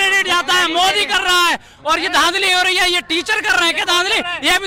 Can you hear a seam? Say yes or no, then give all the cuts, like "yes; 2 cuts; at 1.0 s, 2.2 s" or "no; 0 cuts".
no; 0 cuts